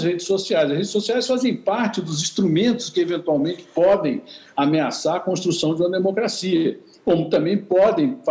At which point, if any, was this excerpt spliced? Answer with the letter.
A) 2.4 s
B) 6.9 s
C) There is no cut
C